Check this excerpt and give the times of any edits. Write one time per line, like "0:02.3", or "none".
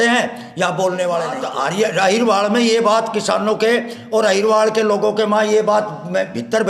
0:01.4